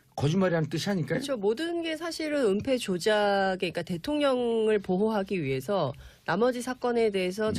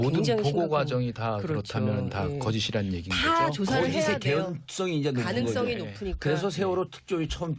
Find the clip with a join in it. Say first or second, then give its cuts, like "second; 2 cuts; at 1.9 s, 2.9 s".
first; 1 cut; at 2.2 s